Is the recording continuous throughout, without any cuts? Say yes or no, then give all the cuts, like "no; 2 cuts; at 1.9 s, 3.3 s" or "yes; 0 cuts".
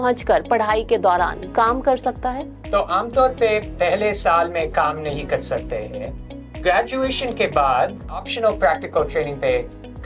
no; 2 cuts; at 6.5 s, 8.2 s